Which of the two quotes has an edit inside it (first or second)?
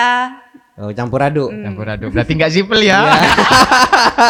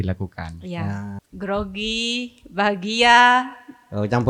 second